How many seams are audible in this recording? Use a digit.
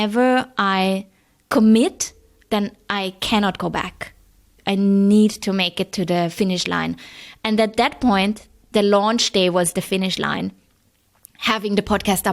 2